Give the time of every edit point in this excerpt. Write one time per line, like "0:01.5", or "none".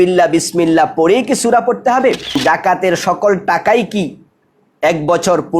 0:02.3